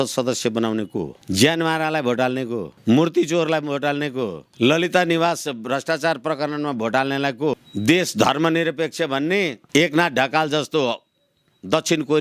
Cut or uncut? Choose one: uncut